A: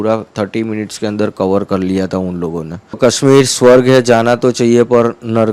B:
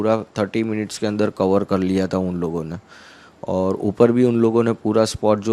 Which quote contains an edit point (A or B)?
A